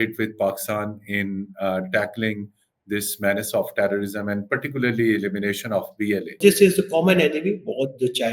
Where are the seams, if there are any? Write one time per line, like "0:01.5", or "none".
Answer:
0:06.4